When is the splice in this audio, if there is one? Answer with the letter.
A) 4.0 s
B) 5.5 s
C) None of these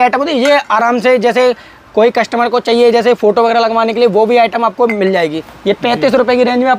B